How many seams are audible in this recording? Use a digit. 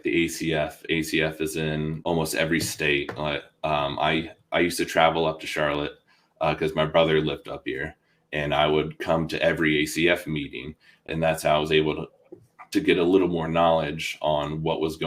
2